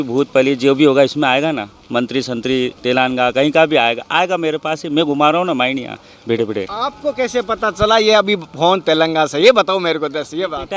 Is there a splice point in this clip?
no; 0 cuts

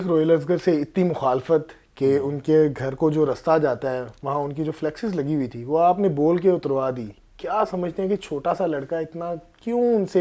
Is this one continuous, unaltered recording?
yes; 0 cuts

